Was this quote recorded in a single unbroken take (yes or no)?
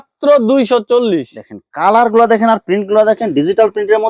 yes